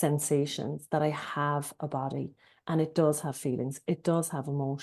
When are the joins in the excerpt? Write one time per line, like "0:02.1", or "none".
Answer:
none